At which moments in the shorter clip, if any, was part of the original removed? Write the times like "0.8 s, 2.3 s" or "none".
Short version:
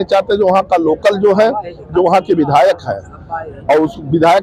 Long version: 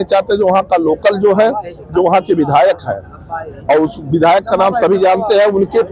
none